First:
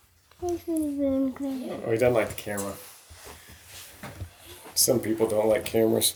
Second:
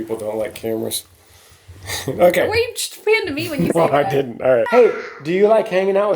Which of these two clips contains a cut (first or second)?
second